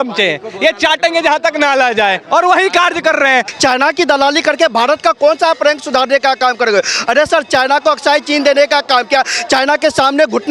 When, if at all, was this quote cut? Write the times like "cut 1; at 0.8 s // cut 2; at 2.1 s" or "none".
cut 1; at 3.5 s